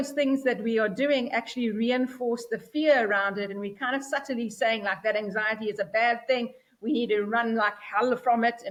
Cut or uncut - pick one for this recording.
uncut